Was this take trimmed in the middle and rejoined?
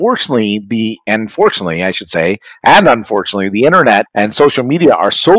yes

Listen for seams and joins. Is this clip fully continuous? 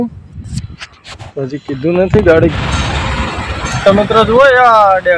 no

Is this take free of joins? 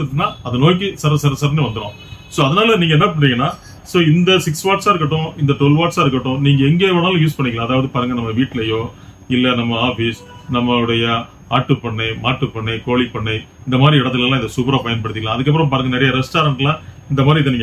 yes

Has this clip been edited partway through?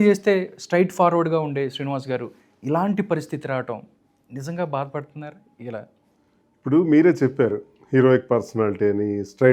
no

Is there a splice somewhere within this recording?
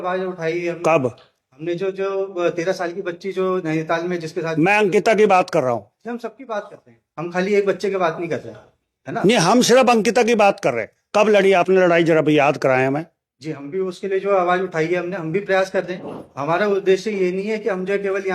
no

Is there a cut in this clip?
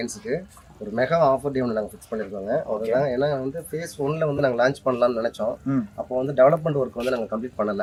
no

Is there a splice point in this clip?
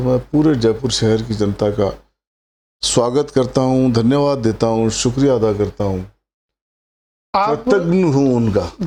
no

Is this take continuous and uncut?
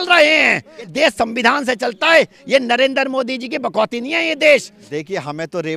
no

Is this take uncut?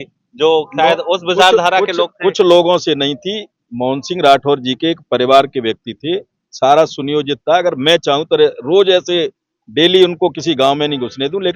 yes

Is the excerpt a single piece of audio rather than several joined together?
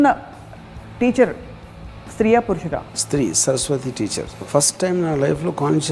no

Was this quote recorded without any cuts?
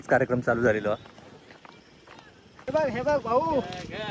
no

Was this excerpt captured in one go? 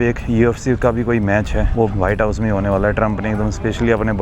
no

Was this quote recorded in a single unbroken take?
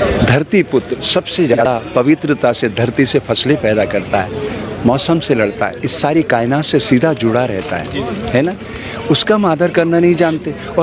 no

